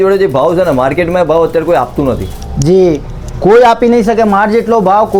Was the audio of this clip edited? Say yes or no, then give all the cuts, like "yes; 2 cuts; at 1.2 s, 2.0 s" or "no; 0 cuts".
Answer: no; 0 cuts